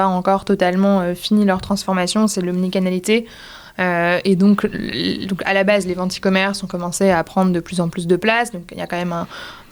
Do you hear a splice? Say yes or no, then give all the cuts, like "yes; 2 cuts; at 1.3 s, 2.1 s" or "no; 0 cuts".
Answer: no; 0 cuts